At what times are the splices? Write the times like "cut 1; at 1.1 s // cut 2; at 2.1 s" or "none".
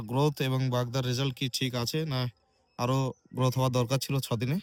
none